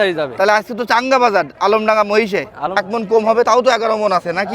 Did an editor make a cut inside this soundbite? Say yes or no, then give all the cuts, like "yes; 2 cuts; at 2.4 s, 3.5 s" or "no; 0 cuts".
yes; 1 cut; at 2.6 s